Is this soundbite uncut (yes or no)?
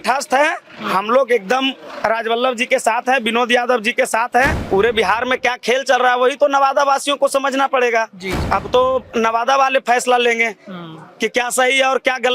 no